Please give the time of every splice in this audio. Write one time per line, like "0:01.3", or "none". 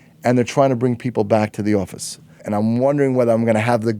0:02.4